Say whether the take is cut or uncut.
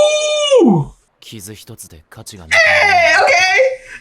cut